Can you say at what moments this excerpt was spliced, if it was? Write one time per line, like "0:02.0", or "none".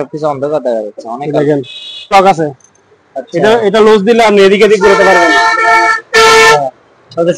0:02.1